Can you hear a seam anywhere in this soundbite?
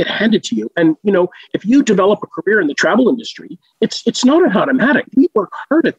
yes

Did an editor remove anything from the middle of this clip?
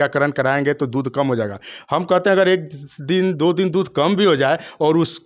no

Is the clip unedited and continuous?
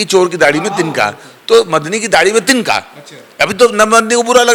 yes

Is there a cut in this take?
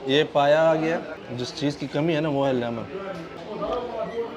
yes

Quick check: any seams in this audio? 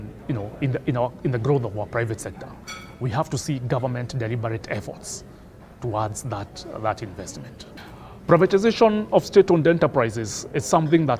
no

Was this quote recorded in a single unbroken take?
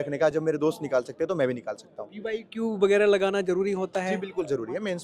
yes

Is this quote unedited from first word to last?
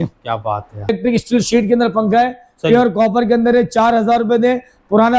no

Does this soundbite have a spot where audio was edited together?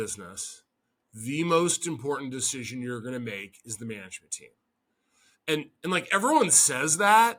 no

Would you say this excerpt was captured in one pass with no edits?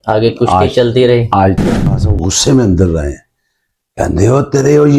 no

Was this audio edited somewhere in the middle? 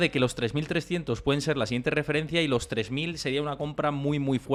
no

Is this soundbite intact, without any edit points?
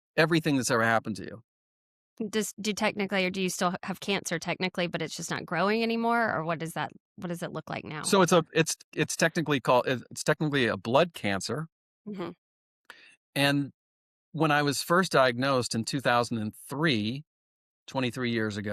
yes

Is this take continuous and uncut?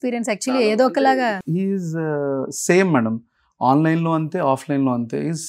no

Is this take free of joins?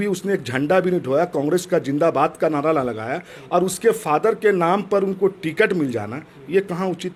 yes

